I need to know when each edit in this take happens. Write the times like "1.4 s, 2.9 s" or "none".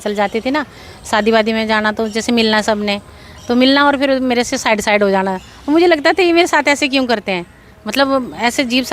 none